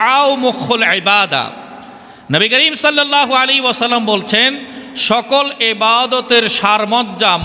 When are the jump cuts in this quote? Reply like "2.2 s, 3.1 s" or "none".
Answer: none